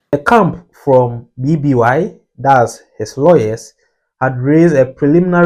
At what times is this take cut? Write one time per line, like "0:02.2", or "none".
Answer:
none